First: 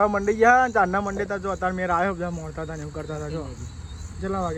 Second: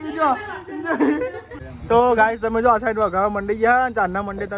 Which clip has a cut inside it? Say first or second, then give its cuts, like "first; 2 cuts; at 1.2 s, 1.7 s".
second; 1 cut; at 1.8 s